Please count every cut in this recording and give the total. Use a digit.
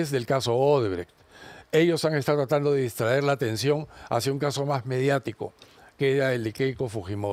0